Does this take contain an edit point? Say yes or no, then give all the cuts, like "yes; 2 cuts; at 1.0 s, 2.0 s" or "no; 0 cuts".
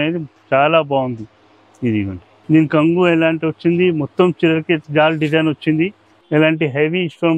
yes; 3 cuts; at 2.3 s, 4.8 s, 6.1 s